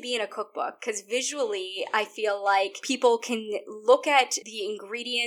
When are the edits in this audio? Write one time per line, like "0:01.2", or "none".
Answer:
0:02.8
0:04.4